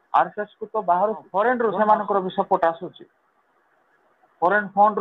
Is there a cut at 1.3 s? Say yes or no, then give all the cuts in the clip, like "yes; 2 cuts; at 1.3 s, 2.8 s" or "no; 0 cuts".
yes; 1 cut; at 1.3 s